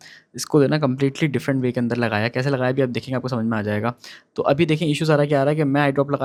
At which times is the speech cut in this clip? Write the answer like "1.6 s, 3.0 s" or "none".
none